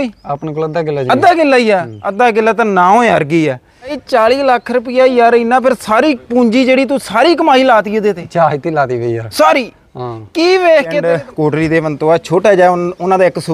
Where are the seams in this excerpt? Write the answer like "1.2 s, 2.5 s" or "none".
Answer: 4.0 s, 11.0 s